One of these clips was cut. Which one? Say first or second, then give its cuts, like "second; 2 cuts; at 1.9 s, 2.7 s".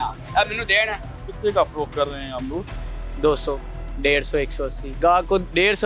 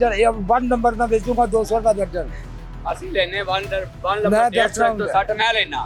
first; 2 cuts; at 1.1 s, 4.8 s